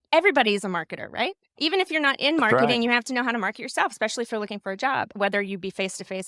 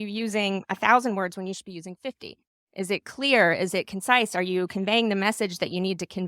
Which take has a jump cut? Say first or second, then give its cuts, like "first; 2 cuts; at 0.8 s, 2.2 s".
first; 2 cuts; at 1.5 s, 5.1 s